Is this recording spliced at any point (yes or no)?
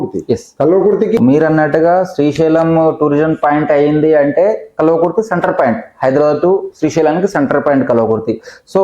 yes